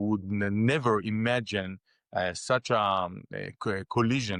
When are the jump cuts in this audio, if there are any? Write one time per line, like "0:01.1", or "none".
none